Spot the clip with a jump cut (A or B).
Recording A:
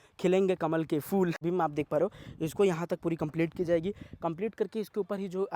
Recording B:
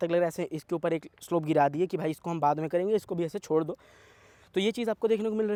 A